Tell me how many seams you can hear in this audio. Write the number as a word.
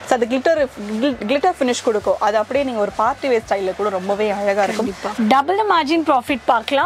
one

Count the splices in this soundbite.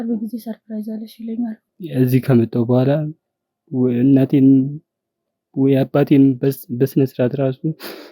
one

